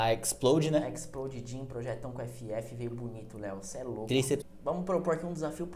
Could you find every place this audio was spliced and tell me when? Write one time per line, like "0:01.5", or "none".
0:04.5